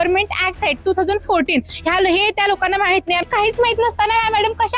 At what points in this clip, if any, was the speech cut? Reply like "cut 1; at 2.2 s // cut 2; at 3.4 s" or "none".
cut 1; at 3.3 s